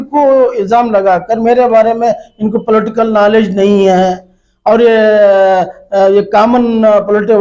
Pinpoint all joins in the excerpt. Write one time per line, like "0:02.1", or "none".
none